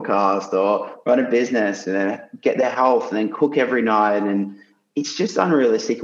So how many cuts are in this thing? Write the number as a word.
zero